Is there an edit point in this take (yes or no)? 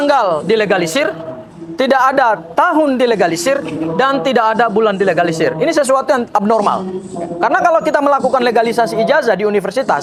no